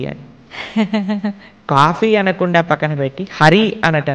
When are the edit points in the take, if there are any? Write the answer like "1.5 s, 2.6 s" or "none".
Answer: 1.7 s